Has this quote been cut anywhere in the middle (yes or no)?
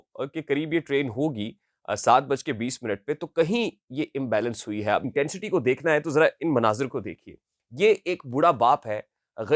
yes